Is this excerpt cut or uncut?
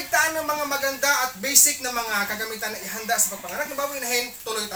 uncut